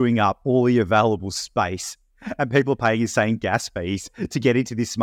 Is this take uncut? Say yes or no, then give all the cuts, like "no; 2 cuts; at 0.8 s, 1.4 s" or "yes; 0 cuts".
yes; 0 cuts